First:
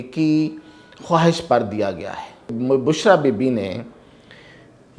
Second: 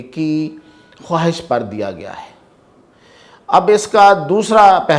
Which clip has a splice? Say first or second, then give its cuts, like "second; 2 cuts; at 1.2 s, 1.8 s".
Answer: first; 1 cut; at 2.5 s